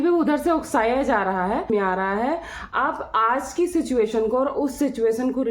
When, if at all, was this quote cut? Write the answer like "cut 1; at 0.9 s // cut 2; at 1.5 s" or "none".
cut 1; at 1.7 s